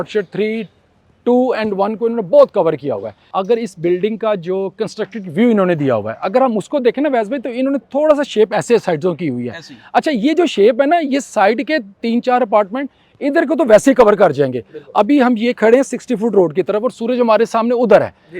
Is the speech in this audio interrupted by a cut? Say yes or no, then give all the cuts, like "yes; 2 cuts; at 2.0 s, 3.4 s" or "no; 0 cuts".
yes; 1 cut; at 3.1 s